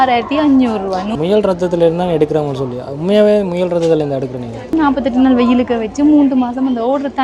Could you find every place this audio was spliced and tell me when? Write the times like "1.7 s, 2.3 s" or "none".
1.2 s, 4.7 s